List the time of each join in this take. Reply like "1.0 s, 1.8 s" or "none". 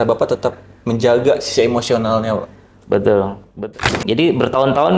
3.4 s